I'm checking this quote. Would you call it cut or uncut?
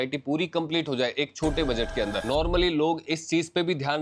cut